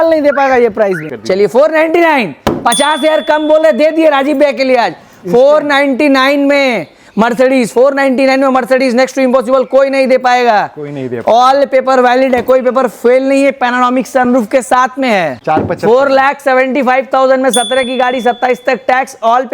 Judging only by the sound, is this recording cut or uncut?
cut